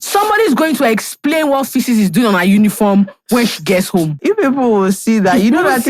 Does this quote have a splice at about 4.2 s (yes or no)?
yes